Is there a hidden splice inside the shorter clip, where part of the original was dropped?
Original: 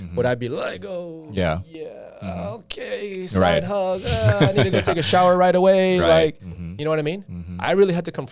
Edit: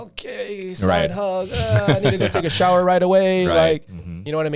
no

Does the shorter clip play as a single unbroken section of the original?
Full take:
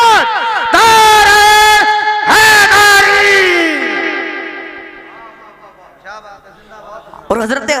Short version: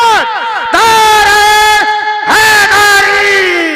yes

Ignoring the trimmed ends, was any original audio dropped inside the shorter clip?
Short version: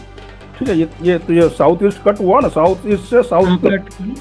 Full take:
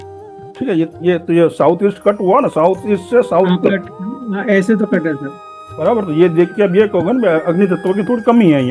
no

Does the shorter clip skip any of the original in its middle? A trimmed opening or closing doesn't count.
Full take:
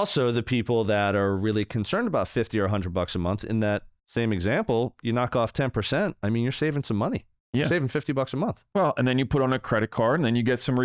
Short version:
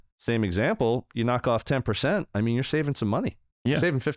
no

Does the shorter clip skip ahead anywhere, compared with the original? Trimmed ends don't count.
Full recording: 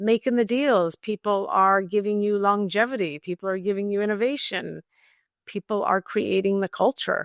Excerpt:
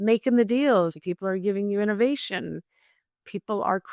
yes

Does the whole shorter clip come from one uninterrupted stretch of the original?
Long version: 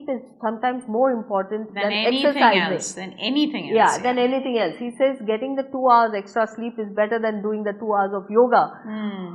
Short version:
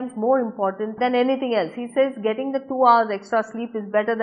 no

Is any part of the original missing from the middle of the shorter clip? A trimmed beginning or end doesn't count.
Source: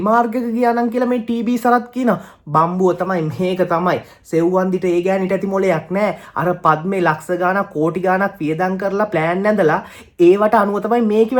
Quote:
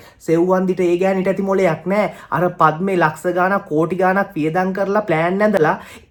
no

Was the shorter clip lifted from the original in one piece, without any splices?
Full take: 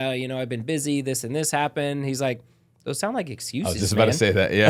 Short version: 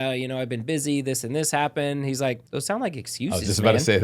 no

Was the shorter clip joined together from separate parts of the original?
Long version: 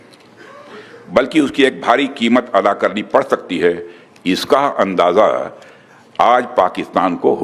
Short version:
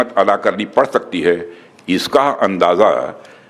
no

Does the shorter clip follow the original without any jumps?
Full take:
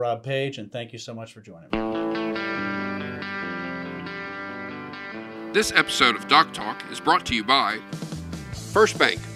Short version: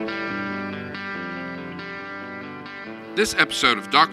no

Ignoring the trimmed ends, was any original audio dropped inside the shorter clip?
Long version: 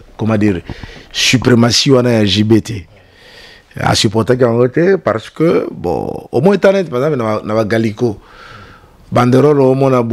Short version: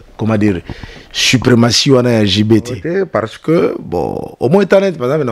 yes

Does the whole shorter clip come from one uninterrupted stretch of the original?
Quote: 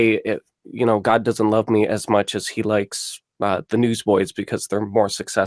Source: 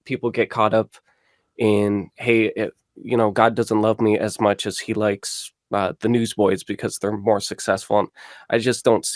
yes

